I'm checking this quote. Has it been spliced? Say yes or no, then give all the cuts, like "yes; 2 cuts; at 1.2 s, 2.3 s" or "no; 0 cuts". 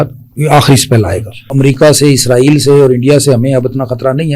yes; 1 cut; at 1.5 s